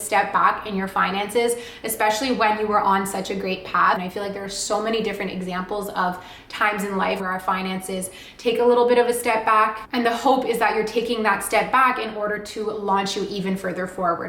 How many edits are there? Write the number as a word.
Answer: two